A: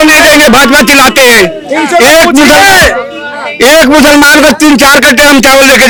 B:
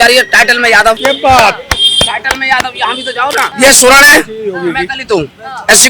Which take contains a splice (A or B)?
B